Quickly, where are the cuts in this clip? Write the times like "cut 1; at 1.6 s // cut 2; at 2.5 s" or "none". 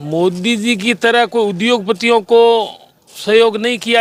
none